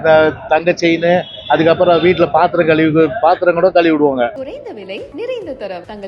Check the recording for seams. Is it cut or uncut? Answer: cut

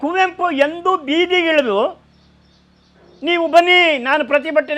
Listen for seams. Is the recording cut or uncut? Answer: uncut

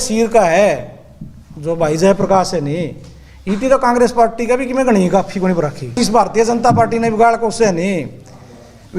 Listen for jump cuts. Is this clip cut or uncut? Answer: cut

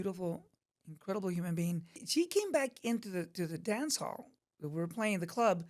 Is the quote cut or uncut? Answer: cut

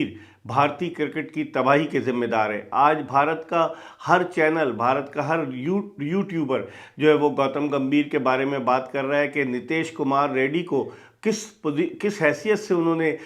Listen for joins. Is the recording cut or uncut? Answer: uncut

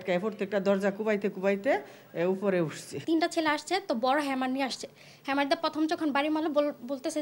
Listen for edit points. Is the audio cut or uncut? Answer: uncut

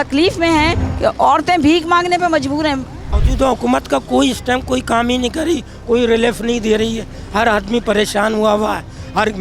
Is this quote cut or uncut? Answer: cut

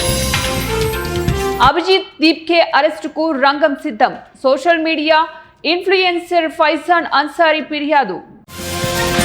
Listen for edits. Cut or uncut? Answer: uncut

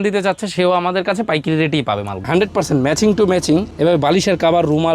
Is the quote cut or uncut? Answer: cut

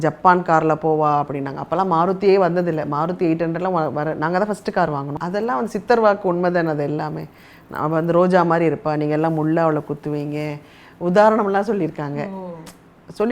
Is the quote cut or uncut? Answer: cut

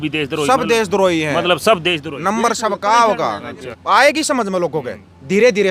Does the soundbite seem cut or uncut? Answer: cut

